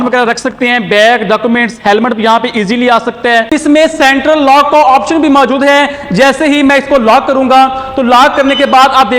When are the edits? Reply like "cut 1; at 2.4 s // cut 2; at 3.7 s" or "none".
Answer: cut 1; at 3.5 s